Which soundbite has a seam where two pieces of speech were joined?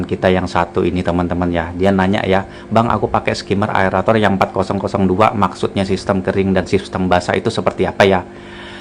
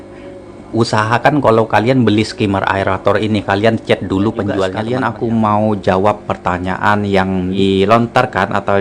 second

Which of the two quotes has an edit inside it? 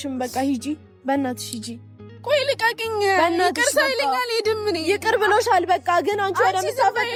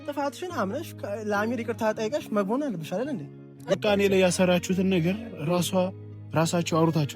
second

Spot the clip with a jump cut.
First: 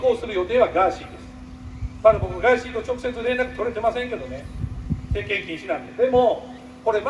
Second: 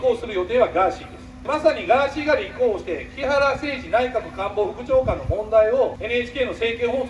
second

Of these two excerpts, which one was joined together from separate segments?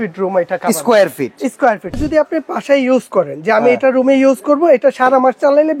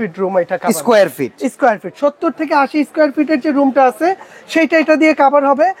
first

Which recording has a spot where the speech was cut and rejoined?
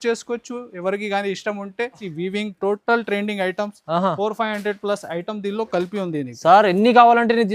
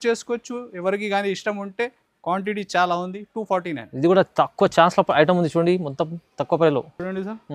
first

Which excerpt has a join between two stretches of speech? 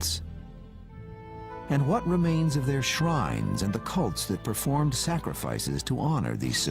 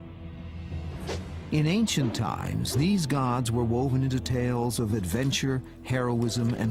first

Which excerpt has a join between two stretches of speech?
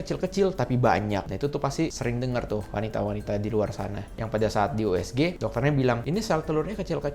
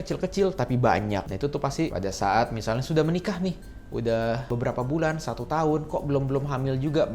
second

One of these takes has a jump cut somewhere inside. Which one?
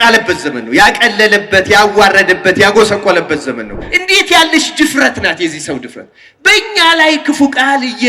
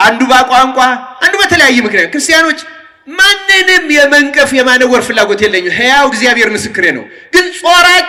first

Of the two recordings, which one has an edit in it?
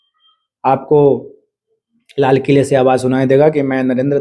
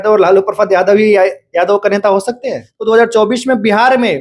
second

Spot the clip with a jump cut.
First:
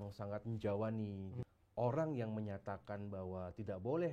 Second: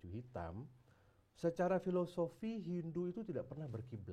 first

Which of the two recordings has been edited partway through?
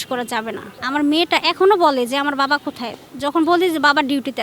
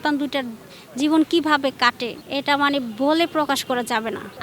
second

